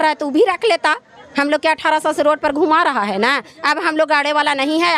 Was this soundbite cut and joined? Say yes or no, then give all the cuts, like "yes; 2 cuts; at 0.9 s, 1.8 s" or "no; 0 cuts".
no; 0 cuts